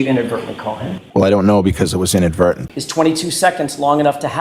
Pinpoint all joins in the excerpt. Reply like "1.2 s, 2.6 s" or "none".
0.9 s, 2.7 s